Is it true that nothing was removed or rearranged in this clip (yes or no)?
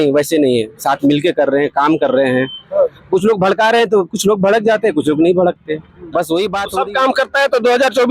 no